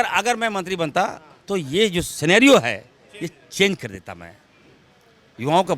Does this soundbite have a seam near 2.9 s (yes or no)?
no